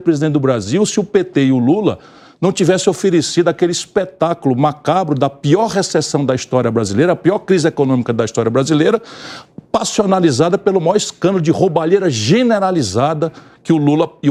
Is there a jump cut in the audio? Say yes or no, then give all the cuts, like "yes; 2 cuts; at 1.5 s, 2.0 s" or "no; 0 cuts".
no; 0 cuts